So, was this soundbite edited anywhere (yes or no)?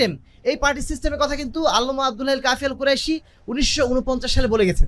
no